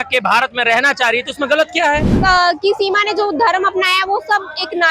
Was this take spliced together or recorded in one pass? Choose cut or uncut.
cut